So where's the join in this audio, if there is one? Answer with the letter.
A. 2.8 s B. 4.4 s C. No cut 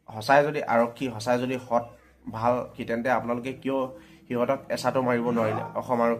A